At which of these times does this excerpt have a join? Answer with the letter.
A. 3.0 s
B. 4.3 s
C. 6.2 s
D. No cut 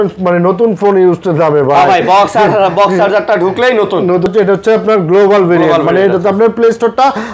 B